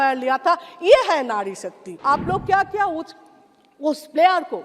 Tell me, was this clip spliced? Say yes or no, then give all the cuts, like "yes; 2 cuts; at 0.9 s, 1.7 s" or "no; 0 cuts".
yes; 1 cut; at 1.9 s